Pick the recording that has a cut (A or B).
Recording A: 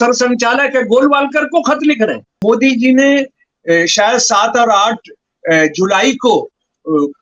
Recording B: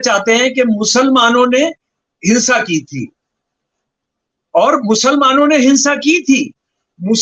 A